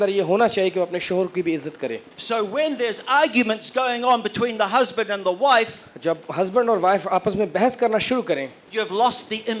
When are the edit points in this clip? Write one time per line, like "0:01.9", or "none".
0:02.1